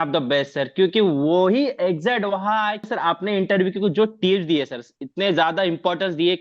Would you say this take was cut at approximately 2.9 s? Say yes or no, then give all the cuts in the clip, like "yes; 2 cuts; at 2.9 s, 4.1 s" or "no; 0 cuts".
yes; 1 cut; at 2.9 s